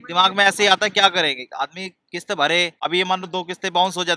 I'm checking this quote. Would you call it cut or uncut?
cut